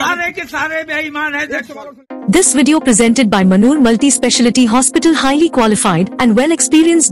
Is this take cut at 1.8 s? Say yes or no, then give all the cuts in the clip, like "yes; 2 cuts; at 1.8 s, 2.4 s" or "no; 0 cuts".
yes; 1 cut; at 1.8 s